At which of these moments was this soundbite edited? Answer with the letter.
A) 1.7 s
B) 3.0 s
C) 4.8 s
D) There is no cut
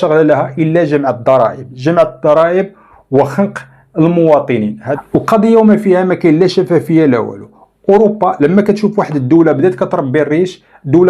C